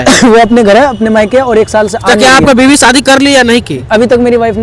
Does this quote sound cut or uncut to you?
uncut